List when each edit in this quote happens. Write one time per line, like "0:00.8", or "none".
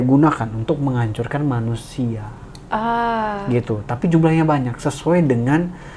none